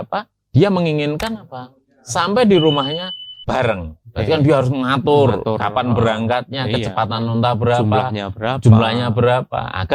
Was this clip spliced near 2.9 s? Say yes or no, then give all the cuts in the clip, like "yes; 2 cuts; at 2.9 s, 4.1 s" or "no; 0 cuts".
no; 0 cuts